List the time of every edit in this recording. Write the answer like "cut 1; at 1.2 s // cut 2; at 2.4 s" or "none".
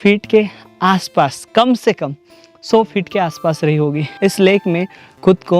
cut 1; at 4.1 s